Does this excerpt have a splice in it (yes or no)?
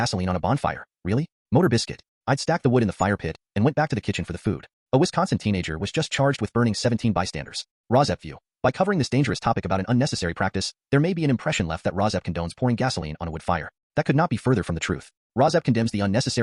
no